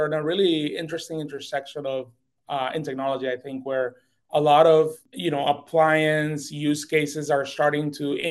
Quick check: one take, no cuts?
no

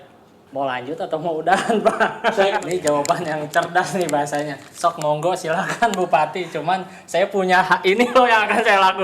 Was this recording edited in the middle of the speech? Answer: yes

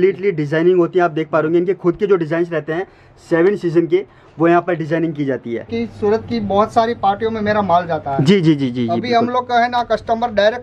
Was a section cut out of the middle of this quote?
yes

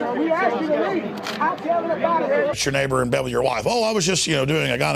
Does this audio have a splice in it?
no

